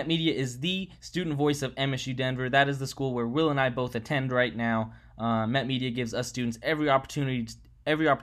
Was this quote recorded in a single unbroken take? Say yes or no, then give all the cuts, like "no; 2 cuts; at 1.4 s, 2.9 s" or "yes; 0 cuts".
yes; 0 cuts